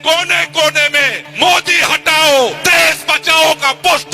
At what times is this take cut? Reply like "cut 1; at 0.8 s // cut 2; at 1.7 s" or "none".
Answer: cut 1; at 1.2 s // cut 2; at 2.6 s